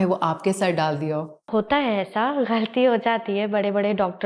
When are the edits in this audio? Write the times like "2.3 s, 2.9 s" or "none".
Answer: 1.5 s